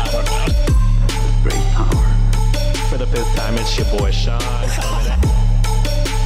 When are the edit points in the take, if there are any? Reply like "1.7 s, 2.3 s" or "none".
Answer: none